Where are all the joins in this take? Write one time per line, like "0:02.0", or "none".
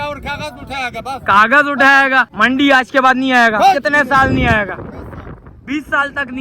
0:02.3